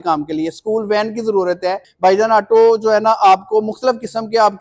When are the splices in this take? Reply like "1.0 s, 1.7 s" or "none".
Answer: 1.9 s